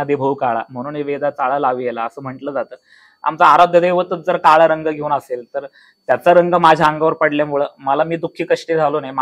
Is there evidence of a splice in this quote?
no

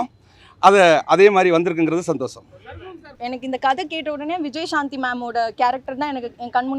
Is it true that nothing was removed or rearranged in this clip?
no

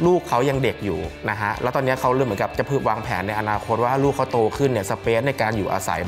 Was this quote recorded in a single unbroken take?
yes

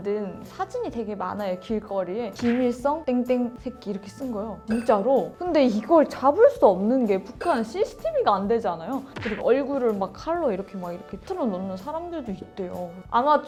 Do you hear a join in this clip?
no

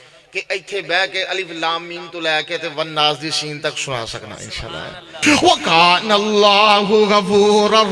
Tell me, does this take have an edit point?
yes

